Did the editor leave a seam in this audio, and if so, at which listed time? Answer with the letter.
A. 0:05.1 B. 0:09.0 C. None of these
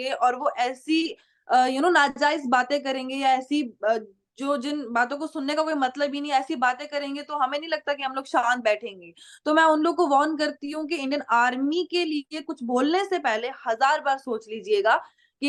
C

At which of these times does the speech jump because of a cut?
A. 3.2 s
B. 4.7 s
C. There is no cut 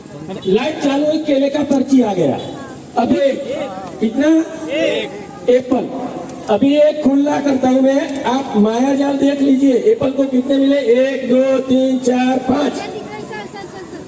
A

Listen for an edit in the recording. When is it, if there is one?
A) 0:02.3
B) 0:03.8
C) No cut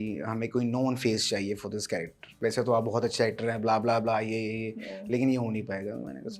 A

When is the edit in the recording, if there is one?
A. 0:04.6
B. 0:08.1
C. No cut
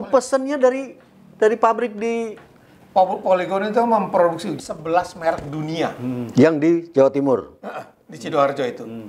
A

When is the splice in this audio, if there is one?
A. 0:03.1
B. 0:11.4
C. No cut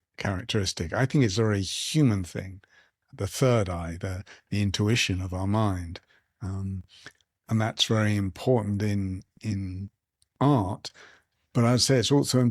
A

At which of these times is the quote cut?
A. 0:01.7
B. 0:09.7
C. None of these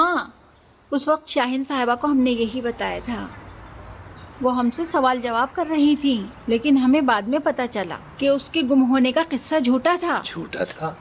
A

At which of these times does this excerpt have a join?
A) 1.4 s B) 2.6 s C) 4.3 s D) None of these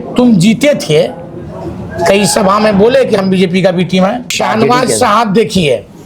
C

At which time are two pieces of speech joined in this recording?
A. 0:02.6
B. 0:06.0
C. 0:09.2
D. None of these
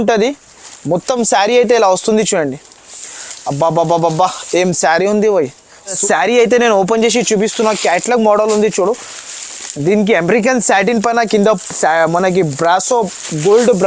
B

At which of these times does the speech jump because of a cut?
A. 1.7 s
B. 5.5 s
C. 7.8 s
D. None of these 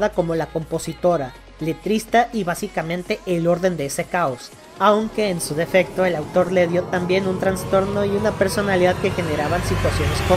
D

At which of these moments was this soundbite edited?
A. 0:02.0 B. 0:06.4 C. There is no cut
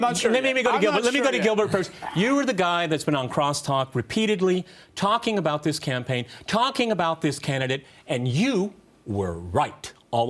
A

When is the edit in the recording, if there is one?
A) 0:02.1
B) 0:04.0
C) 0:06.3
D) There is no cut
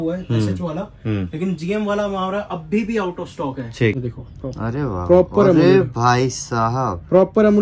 B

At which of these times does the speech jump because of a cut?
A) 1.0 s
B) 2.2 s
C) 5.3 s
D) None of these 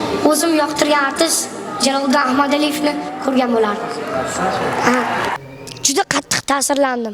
C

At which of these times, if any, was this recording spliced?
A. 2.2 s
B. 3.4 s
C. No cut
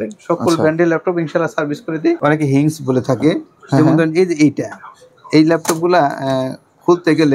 A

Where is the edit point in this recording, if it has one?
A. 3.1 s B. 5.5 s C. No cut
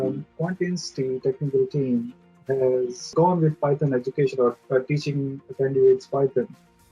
A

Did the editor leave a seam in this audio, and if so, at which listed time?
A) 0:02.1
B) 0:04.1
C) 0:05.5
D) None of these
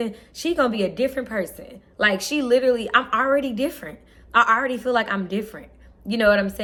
D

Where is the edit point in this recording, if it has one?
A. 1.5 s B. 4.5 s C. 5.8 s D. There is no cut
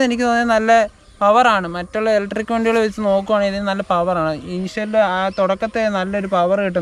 D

